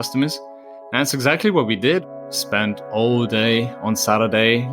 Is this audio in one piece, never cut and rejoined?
no; 1 cut; at 2.1 s

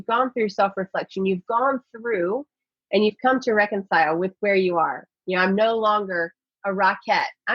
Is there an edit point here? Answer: no; 0 cuts

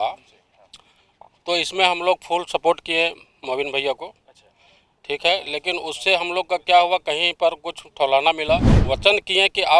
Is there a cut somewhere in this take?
yes; 1 cut; at 8.7 s

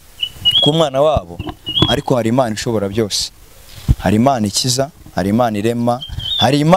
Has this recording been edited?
no; 0 cuts

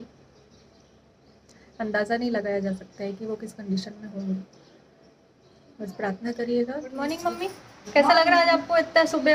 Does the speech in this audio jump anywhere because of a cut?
yes; 1 cut; at 7.2 s

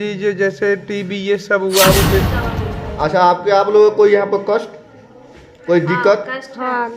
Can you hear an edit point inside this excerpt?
yes; 1 cut; at 2.3 s

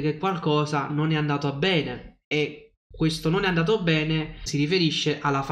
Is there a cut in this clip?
yes; 1 cut; at 4.4 s

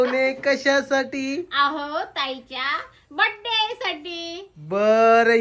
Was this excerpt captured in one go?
yes; 0 cuts

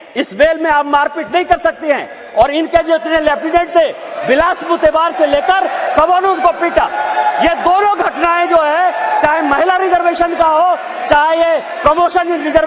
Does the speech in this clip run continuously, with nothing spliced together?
yes; 0 cuts

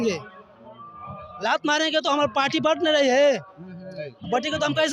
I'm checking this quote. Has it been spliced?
no; 0 cuts

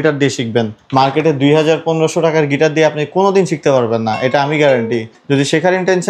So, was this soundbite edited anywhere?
no; 0 cuts

